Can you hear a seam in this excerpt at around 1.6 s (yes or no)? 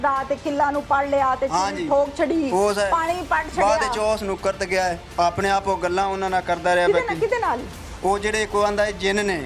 no